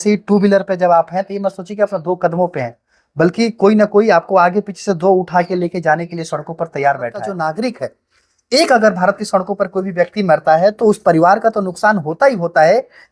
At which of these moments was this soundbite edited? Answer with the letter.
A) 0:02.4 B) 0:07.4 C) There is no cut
B